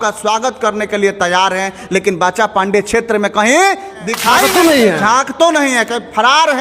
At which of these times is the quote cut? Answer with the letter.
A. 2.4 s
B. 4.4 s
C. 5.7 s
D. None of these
B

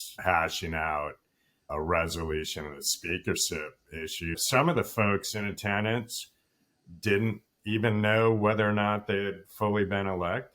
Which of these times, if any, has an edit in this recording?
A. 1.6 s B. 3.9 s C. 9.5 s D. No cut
D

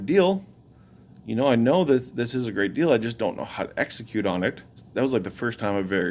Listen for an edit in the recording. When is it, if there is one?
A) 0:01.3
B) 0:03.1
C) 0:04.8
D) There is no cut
C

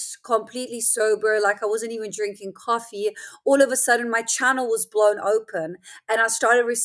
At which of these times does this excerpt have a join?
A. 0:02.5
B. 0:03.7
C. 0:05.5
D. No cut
D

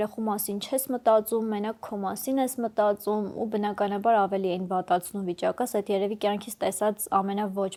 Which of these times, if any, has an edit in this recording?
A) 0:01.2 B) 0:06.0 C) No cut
C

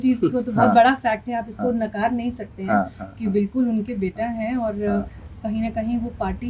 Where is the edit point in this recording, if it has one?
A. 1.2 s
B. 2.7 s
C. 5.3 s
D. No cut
D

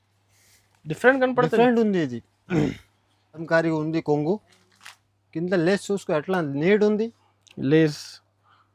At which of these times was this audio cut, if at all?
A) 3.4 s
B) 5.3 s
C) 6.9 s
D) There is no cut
A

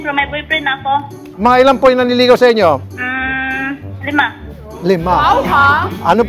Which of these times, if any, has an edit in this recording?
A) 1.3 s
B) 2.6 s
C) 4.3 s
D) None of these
A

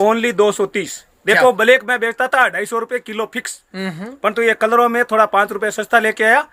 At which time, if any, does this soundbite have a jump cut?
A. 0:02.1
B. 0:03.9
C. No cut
C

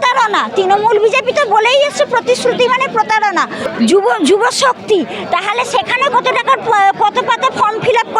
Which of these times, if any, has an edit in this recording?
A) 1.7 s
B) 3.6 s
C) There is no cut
B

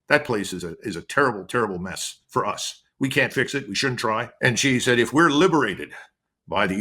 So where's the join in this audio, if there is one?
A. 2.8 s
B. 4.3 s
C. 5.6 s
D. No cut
B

